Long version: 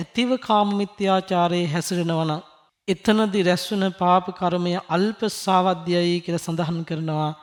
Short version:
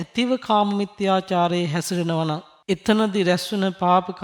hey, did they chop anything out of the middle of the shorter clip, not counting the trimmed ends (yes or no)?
yes